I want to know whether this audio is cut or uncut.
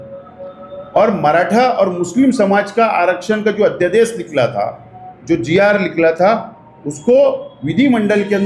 uncut